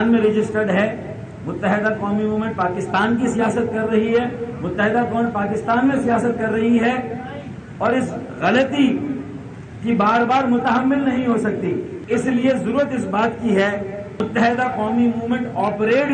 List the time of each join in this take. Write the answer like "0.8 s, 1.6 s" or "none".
none